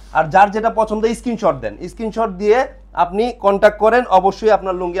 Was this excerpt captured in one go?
yes; 0 cuts

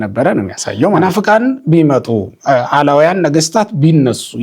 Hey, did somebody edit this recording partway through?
yes; 1 cut; at 1.0 s

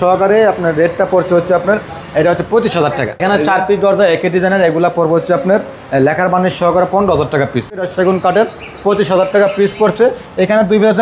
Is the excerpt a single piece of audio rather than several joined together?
no; 2 cuts; at 3.2 s, 7.8 s

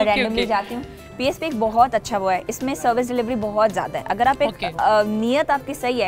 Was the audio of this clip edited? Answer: yes; 1 cut; at 1.0 s

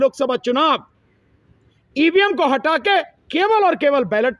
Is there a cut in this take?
no; 0 cuts

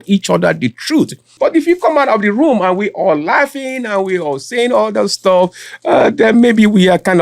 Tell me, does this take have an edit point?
yes; 1 cut; at 1.3 s

